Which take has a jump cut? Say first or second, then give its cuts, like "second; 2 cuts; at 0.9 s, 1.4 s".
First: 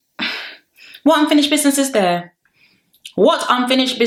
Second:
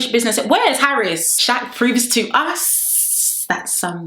second; 1 cut; at 1.4 s